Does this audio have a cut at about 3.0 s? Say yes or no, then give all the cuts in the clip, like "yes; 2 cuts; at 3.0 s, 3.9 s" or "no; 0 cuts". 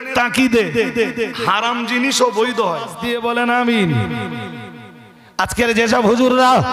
yes; 1 cut; at 3.0 s